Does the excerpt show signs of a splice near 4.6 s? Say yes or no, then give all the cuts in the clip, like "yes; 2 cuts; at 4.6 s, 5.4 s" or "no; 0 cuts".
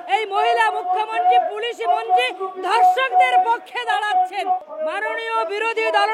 yes; 1 cut; at 4.6 s